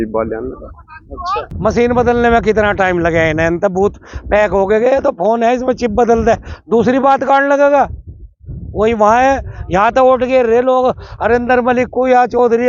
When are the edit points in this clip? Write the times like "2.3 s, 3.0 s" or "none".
1.5 s